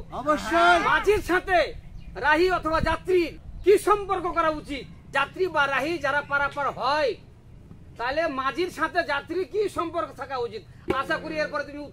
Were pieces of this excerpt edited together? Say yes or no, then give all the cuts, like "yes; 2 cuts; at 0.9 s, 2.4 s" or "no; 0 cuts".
no; 0 cuts